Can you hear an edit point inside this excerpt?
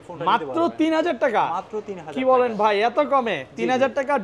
no; 0 cuts

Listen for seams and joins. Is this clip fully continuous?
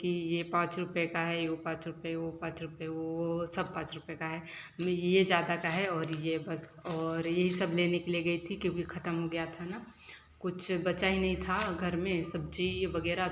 yes; 0 cuts

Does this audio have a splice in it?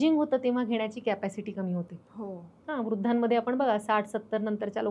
no; 0 cuts

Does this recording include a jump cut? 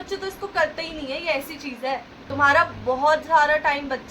yes; 1 cut; at 2.2 s

